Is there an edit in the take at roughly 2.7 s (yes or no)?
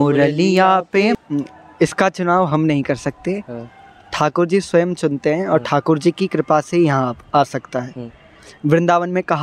no